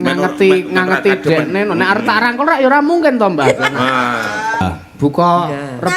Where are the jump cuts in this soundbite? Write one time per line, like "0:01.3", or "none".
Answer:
0:04.6